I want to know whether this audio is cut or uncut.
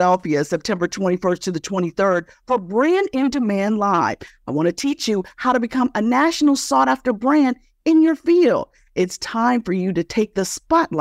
uncut